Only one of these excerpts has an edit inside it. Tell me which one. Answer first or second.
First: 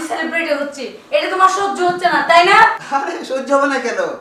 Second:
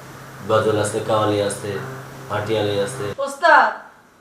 second